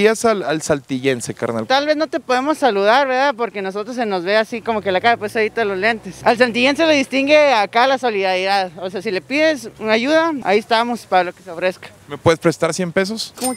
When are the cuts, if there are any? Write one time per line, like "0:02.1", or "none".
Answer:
none